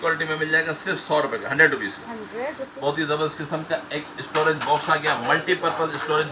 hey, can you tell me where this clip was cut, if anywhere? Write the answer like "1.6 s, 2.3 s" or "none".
2.8 s